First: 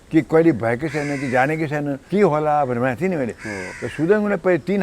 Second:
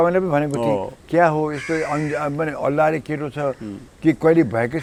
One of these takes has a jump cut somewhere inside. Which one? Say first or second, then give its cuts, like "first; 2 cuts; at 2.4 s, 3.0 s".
first; 1 cut; at 2.0 s